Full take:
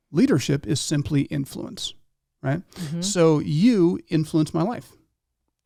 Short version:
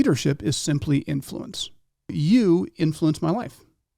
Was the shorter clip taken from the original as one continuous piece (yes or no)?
no